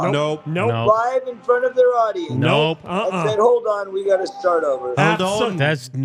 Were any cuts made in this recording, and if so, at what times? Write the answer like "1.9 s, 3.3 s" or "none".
none